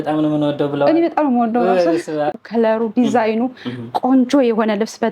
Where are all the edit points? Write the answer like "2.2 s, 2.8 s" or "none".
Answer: 2.3 s